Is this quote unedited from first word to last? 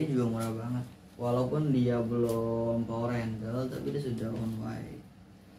yes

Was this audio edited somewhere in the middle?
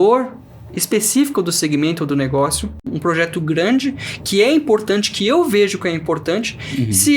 yes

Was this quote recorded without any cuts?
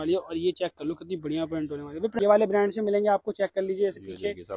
no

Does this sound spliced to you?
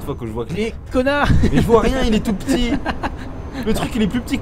no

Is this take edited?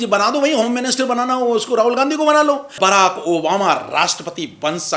yes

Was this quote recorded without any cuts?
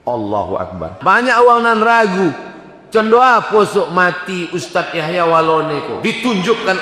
no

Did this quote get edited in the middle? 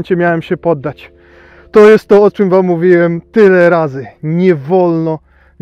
no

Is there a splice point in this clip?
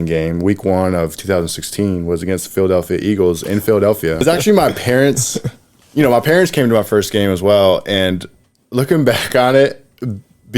yes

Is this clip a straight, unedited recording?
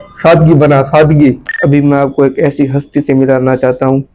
no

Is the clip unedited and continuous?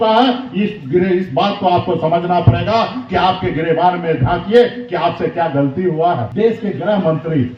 no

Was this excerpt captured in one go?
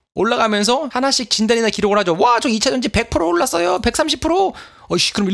yes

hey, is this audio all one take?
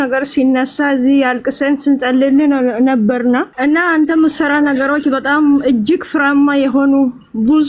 no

